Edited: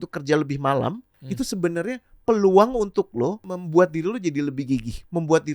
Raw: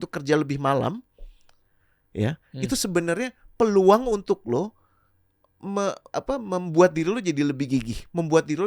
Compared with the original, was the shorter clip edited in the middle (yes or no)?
yes